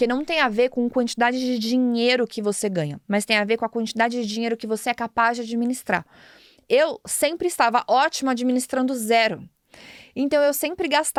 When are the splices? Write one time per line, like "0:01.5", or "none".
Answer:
none